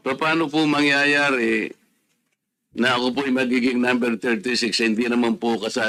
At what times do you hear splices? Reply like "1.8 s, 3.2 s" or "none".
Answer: none